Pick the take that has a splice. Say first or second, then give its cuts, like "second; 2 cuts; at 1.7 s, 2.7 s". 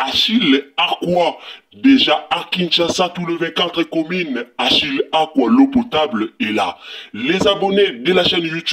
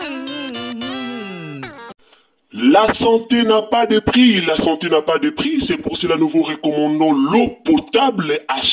second; 1 cut; at 1.9 s